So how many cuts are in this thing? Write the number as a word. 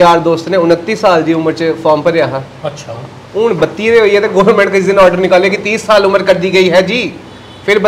zero